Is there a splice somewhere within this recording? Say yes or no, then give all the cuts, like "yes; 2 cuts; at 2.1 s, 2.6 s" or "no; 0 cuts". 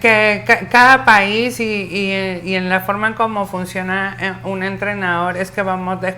no; 0 cuts